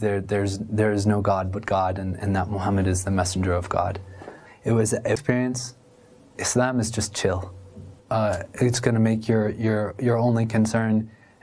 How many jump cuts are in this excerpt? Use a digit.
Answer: 1